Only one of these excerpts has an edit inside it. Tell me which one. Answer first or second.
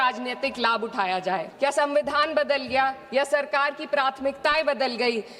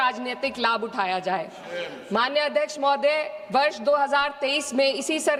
first